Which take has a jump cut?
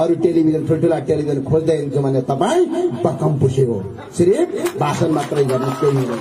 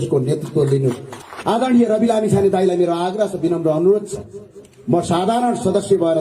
second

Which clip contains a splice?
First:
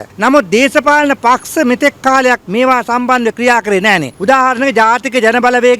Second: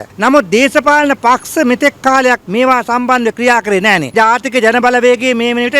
second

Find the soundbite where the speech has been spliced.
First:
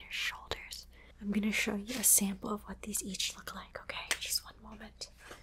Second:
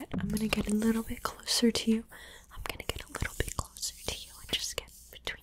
first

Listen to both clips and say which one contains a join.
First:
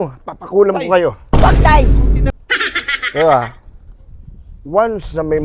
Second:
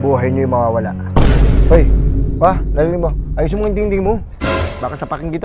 first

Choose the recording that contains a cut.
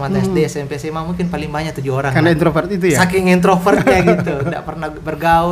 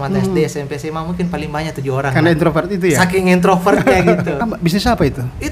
second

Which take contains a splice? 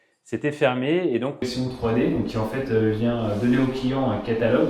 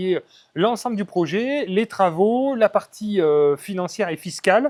first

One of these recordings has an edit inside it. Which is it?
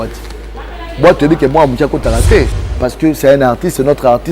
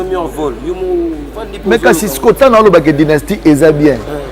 first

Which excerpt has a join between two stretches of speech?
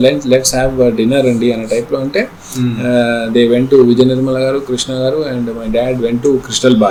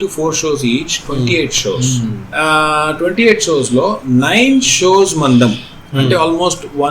second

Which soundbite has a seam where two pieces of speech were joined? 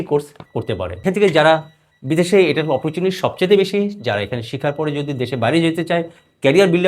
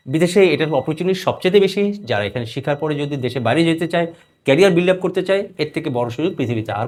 first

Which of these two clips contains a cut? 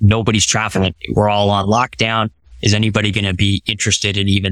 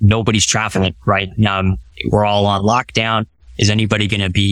first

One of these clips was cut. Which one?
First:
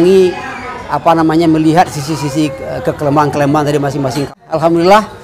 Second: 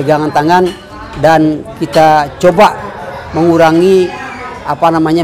first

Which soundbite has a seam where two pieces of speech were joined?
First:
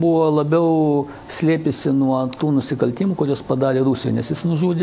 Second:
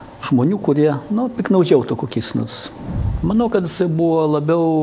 second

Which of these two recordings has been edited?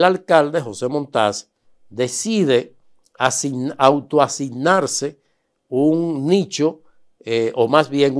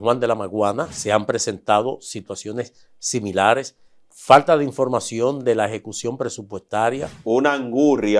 second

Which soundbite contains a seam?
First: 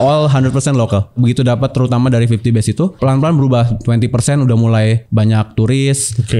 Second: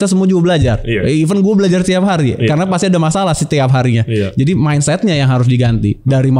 first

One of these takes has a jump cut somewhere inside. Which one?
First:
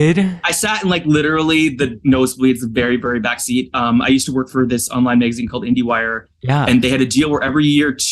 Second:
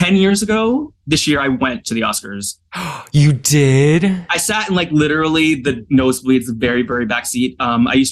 second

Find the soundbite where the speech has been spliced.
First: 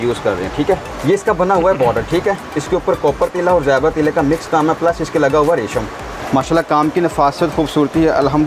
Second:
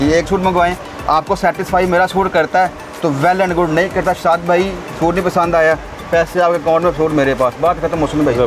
first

